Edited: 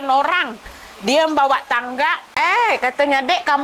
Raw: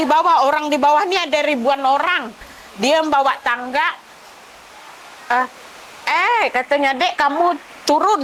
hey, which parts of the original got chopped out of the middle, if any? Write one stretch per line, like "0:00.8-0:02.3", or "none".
0:04.0-0:06.0